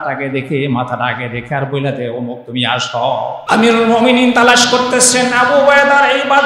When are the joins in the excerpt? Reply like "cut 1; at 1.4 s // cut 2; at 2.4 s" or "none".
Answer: cut 1; at 3.4 s

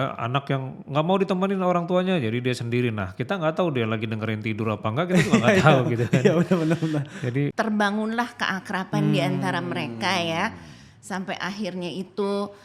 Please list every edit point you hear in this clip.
cut 1; at 7.5 s

